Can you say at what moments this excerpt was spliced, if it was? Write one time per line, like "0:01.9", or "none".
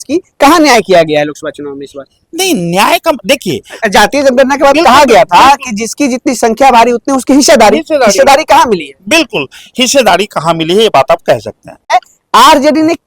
0:11.9